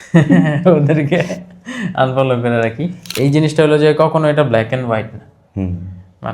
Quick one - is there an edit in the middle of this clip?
yes; 1 cut; at 3.1 s

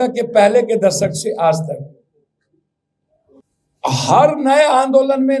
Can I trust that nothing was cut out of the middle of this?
no; 1 cut; at 3.4 s

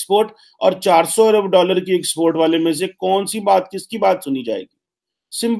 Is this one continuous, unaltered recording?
yes; 0 cuts

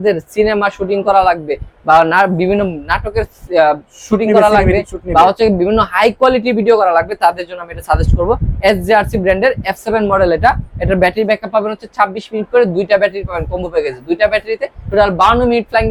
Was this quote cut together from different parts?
no; 0 cuts

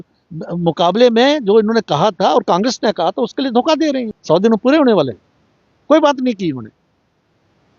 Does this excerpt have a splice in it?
yes; 1 cut; at 4.1 s

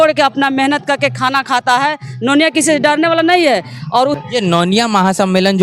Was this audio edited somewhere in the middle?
yes; 1 cut; at 4.2 s

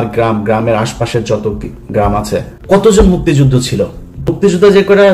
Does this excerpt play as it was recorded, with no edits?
no; 2 cuts; at 2.5 s, 4.4 s

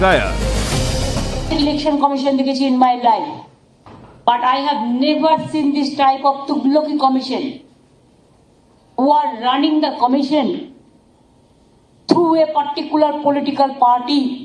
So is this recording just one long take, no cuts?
no; 1 cut; at 4.6 s

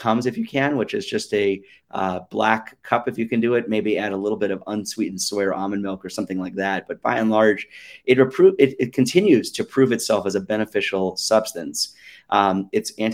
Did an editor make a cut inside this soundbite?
no; 0 cuts

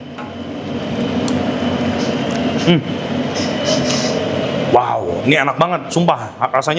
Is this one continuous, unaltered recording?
yes; 0 cuts

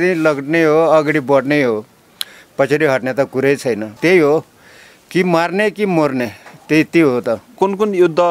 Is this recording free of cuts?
no; 2 cuts; at 4.0 s, 7.5 s

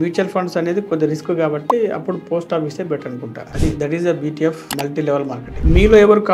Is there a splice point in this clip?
yes; 2 cuts; at 3.4 s, 5.6 s

